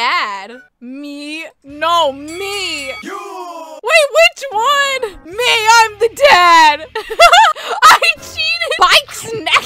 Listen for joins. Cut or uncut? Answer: cut